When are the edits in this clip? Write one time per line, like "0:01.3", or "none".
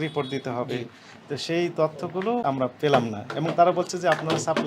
0:02.4